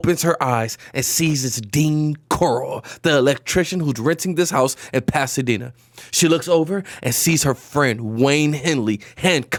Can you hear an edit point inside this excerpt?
no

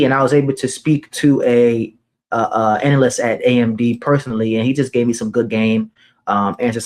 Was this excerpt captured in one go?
yes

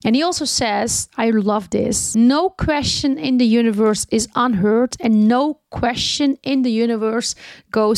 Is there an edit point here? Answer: no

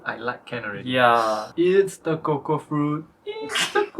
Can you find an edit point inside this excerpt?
yes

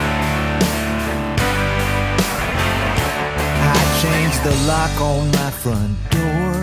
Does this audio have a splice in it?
no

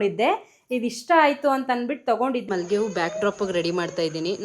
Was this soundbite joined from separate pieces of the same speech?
yes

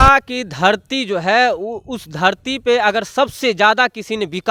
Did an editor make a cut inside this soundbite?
no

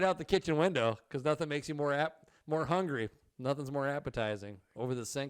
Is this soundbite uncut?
yes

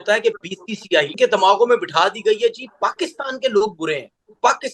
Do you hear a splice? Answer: yes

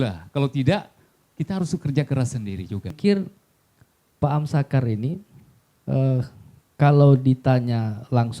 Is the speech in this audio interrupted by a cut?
yes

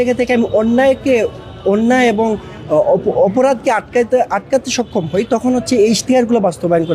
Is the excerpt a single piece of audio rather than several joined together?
yes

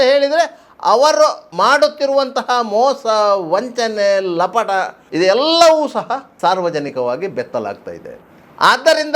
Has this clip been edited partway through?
yes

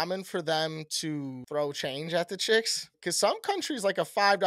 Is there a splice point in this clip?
yes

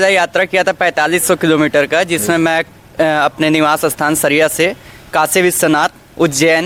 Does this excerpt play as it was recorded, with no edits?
yes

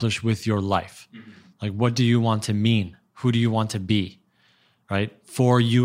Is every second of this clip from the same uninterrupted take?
yes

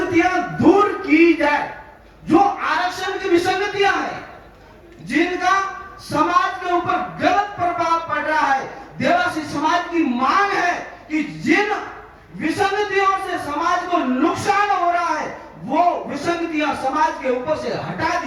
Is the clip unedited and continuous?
yes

